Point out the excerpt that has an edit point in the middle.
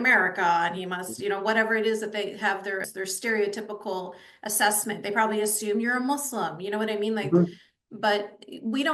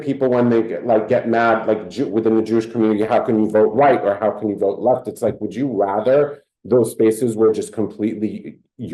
first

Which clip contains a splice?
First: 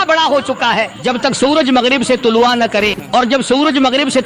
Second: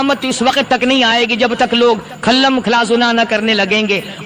first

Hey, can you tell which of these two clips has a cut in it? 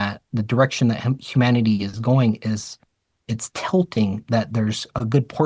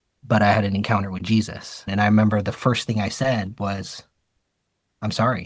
second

